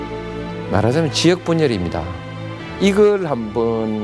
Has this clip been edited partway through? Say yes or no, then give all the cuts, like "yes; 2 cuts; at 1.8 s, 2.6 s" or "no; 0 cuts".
yes; 1 cut; at 2.6 s